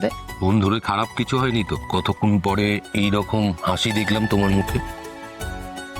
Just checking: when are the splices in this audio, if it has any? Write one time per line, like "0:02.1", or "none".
0:01.8
0:04.8